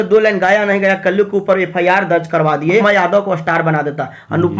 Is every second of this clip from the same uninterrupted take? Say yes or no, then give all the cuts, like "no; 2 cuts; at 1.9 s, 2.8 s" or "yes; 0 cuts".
no; 1 cut; at 2.8 s